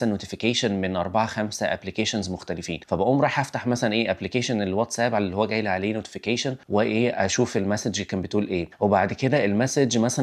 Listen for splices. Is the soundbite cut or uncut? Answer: uncut